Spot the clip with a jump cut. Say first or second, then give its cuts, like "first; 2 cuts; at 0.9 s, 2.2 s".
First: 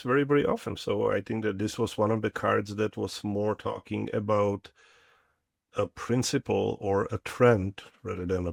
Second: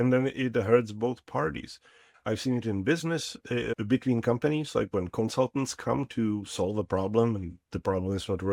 second; 2 cuts; at 2.0 s, 3.7 s